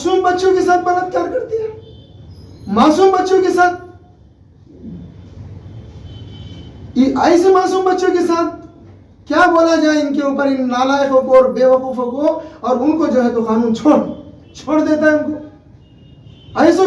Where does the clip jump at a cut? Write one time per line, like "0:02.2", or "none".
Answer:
none